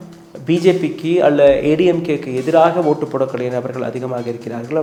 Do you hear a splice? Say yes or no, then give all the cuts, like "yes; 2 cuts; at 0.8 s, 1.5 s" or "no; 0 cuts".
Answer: no; 0 cuts